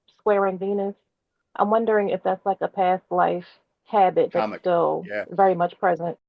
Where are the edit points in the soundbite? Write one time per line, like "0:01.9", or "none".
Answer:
none